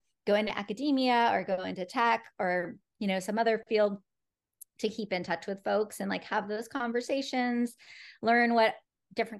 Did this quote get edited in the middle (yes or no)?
no